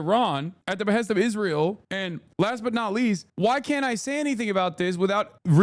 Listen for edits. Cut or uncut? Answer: uncut